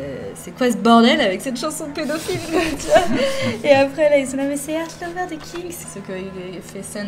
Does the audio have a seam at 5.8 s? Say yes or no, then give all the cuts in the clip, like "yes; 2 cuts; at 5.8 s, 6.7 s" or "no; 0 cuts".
yes; 1 cut; at 5.8 s